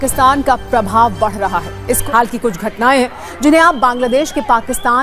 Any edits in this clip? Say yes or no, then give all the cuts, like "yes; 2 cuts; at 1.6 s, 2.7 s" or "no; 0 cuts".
yes; 1 cut; at 2.0 s